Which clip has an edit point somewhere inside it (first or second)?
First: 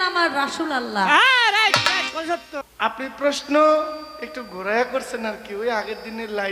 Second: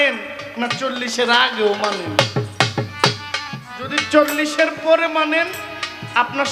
first